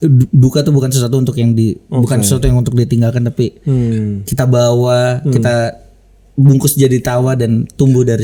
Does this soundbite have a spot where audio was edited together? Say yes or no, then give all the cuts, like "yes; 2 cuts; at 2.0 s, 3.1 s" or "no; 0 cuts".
no; 0 cuts